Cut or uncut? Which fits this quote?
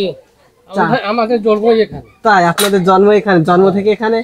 uncut